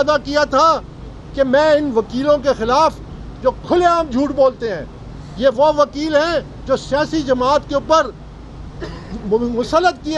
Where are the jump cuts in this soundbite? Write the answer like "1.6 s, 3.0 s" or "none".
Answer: none

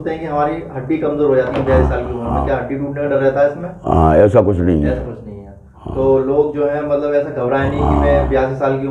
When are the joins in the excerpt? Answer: none

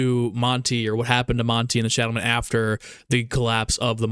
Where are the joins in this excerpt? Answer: none

